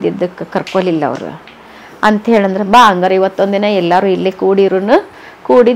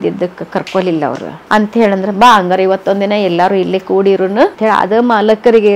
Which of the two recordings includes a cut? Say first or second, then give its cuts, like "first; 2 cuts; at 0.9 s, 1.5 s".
second; 2 cuts; at 1.3 s, 4.5 s